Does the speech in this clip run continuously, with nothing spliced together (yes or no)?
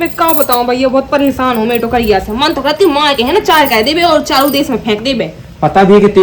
yes